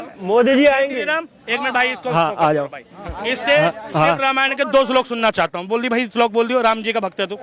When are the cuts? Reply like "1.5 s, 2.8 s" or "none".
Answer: none